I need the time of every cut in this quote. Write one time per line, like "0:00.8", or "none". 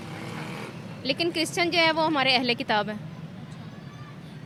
none

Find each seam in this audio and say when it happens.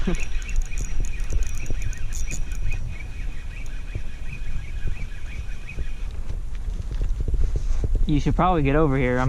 none

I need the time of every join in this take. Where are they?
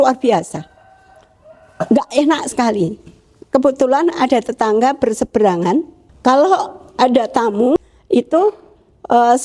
0:06.0
0:07.8

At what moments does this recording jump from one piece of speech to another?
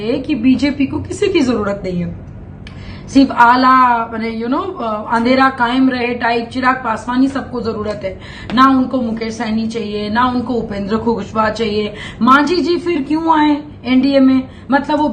none

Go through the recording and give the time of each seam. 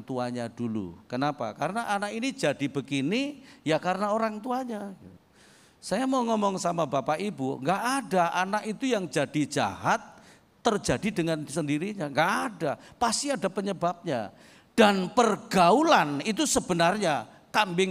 none

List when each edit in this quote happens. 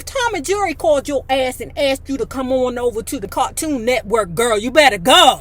0:03.3

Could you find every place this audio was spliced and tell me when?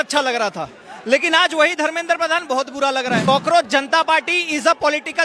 0:03.2

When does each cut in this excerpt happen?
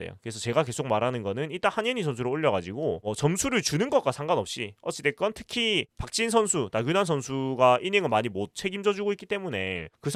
none

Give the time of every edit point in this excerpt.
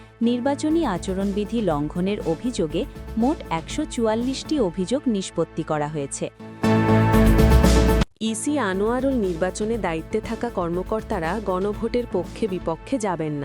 0:06.4

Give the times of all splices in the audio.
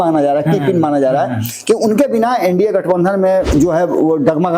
0:03.5

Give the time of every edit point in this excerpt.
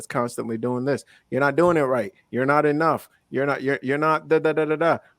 none

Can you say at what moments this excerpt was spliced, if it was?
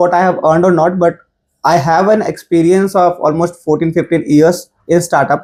none

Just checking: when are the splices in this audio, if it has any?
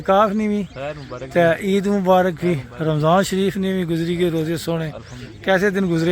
none

